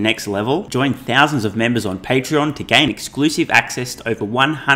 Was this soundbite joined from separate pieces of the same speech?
no; 0 cuts

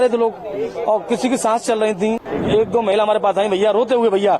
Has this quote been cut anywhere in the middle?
yes; 1 cut; at 2.2 s

